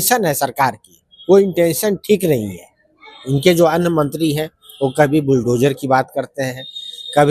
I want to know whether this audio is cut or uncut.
uncut